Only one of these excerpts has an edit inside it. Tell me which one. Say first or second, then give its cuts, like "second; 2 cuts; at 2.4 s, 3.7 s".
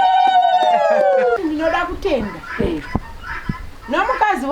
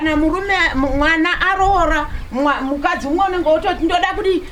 first; 1 cut; at 1.4 s